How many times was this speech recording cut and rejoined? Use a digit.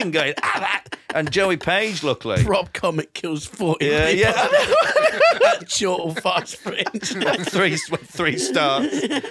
0